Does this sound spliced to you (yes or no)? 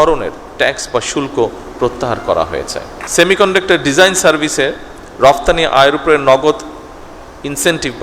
yes